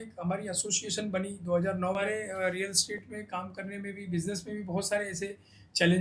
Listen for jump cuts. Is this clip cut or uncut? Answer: cut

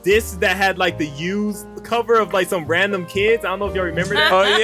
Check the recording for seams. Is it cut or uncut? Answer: cut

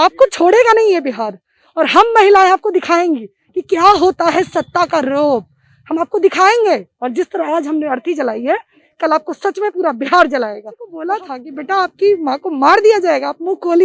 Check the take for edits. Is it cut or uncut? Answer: cut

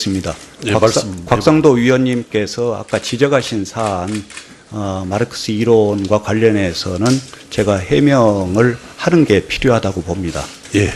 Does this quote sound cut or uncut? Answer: cut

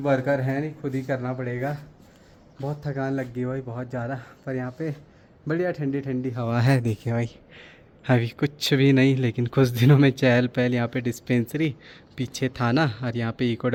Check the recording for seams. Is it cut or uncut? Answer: uncut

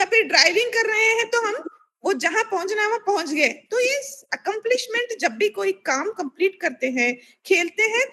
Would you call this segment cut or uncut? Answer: uncut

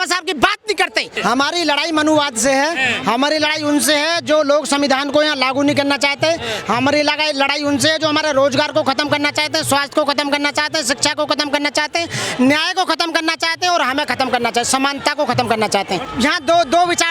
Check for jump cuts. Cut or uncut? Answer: cut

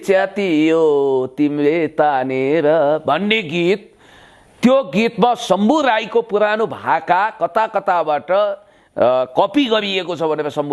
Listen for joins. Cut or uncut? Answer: uncut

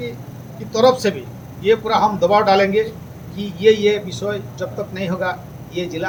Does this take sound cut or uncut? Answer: uncut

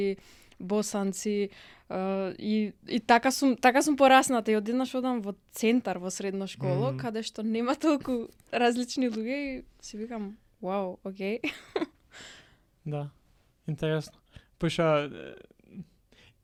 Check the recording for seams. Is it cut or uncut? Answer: uncut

